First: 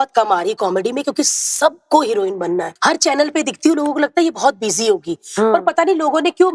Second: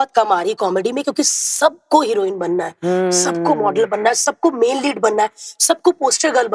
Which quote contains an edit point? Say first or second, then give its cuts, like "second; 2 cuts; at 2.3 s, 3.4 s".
first; 1 cut; at 2.7 s